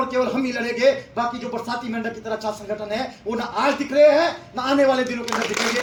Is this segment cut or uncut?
uncut